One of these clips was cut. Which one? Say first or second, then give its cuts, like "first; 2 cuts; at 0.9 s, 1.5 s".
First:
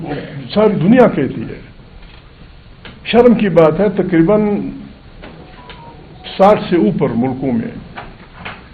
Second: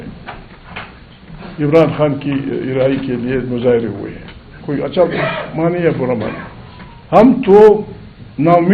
second; 1 cut; at 4.5 s